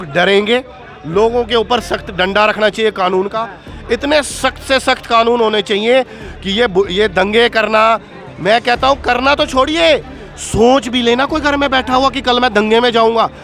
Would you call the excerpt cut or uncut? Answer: uncut